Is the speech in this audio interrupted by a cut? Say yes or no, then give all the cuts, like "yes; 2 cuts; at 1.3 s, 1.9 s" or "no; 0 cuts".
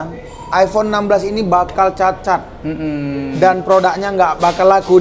no; 0 cuts